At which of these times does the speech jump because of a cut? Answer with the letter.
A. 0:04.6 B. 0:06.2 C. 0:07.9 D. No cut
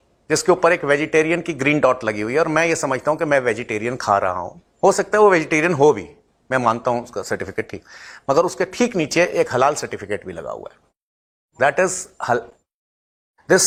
D